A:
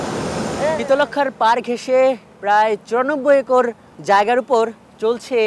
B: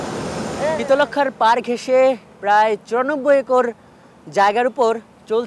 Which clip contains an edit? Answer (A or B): A